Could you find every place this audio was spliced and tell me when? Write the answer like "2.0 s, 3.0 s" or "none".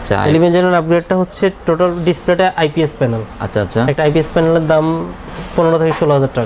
none